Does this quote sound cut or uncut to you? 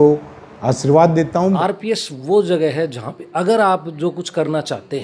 cut